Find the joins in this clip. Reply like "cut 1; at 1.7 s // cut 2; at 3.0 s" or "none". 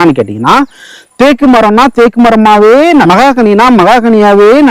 cut 1; at 3.0 s